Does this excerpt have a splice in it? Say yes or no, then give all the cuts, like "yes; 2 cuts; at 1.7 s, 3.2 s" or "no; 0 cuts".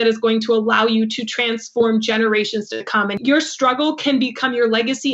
yes; 1 cut; at 3.1 s